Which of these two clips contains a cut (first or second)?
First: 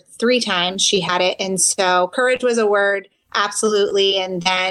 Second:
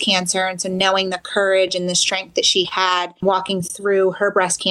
second